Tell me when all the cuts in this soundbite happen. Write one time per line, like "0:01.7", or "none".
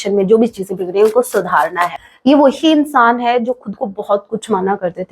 0:02.0